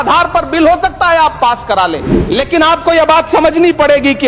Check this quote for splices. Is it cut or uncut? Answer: cut